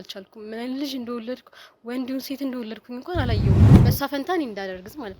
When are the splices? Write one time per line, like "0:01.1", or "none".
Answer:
0:03.6